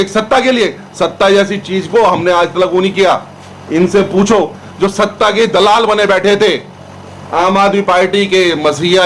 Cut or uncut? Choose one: uncut